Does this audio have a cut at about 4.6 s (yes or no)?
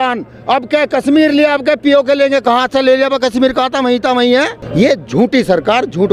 yes